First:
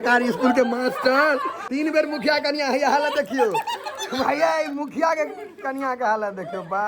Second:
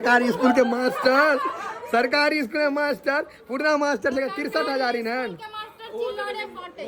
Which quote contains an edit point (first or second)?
first